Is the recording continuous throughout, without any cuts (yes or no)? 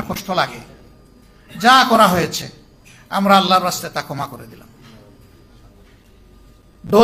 yes